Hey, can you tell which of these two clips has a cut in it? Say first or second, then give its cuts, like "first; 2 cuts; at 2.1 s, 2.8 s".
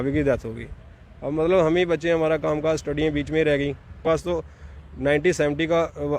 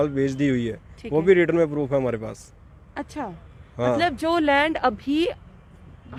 first; 1 cut; at 4.0 s